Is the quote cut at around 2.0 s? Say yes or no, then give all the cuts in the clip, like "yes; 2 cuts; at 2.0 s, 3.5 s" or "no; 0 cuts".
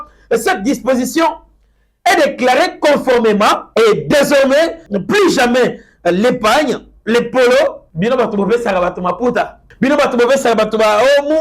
no; 4 cuts; at 3.6 s, 4.9 s, 7.9 s, 9.6 s